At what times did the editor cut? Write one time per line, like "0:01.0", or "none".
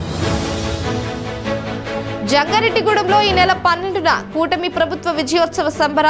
0:01.6